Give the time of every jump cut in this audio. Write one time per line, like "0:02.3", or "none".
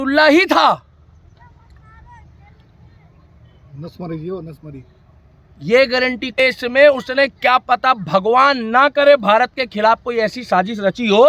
0:06.4